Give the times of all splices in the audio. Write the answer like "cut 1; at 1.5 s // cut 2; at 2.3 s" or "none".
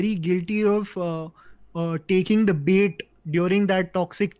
none